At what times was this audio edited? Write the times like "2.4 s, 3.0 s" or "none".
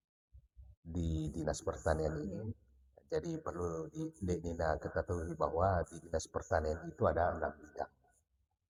none